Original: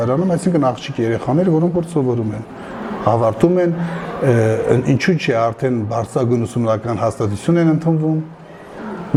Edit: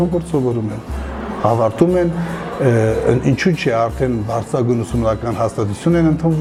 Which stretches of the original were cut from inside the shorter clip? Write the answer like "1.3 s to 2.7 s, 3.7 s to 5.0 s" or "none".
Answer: none